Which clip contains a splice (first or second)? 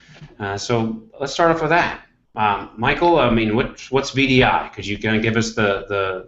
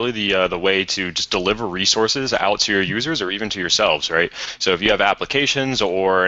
second